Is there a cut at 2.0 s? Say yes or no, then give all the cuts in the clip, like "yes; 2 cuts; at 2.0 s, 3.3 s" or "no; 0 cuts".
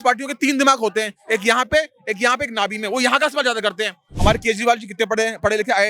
no; 1 cut; at 4.1 s